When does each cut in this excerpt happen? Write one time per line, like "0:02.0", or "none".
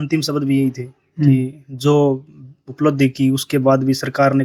none